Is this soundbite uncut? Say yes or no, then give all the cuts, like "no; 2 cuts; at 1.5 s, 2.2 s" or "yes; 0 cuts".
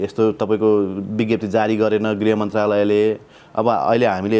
yes; 0 cuts